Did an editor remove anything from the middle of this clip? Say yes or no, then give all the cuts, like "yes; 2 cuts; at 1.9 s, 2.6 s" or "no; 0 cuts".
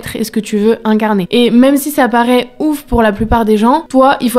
yes; 1 cut; at 1.3 s